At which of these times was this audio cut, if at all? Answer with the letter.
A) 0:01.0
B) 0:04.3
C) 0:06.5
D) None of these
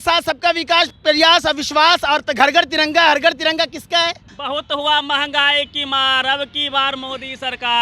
B